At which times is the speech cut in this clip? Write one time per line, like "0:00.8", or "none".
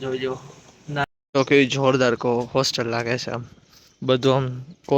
0:01.0